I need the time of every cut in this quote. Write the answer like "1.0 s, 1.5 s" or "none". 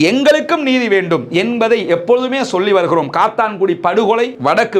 none